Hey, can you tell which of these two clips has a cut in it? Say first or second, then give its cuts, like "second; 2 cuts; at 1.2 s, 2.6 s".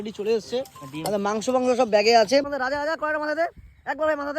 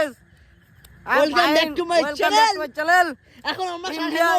first; 1 cut; at 2.5 s